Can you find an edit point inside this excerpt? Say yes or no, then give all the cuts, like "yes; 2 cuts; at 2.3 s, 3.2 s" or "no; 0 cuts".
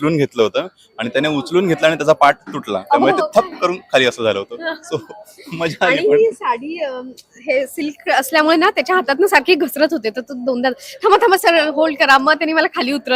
no; 0 cuts